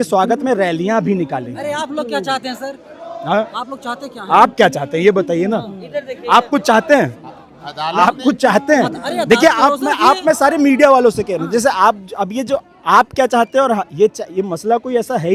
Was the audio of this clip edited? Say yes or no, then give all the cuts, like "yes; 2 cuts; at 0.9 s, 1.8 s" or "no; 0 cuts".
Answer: no; 0 cuts